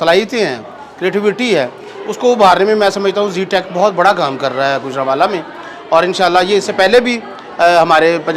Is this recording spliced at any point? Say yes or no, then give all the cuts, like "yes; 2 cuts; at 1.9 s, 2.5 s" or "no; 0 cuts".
no; 0 cuts